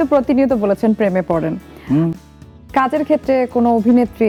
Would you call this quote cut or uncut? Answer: uncut